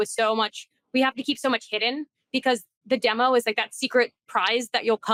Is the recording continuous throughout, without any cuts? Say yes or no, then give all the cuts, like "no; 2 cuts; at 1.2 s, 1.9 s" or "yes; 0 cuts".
yes; 0 cuts